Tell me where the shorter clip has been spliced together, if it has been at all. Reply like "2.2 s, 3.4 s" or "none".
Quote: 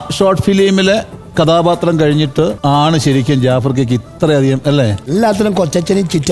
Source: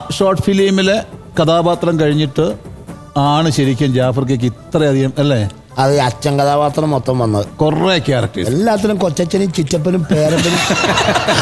2.6 s, 5.0 s